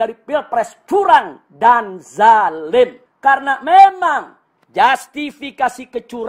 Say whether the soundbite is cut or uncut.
cut